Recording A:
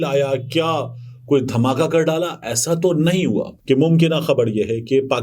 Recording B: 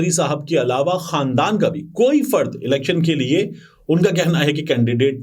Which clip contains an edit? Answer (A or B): A